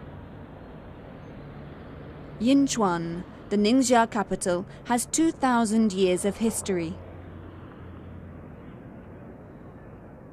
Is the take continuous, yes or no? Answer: yes